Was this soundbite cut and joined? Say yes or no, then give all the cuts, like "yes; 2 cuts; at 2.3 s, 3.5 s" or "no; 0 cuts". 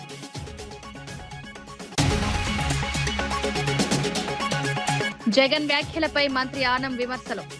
yes; 3 cuts; at 1.9 s, 3.3 s, 4.7 s